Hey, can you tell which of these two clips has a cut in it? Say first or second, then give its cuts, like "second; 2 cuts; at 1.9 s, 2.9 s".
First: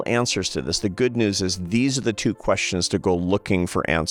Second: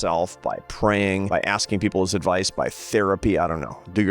second; 1 cut; at 1.3 s